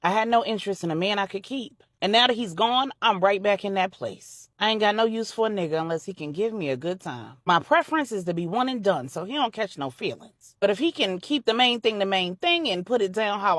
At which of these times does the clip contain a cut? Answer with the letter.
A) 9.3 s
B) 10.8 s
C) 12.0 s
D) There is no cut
D